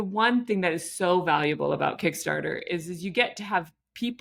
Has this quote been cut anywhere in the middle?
no; 0 cuts

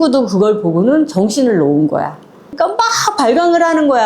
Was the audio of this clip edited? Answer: yes; 1 cut; at 2.5 s

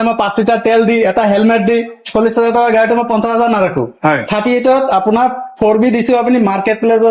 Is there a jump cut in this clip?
no; 0 cuts

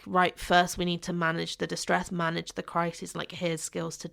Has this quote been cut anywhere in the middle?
no; 0 cuts

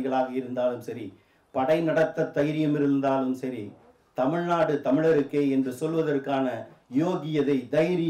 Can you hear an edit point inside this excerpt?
no; 0 cuts

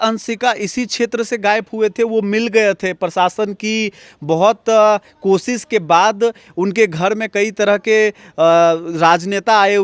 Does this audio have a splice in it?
no; 0 cuts

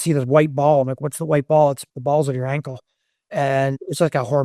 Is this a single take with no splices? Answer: no; 1 cut; at 1.9 s

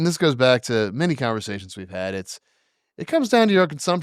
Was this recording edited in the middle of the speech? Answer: no; 0 cuts

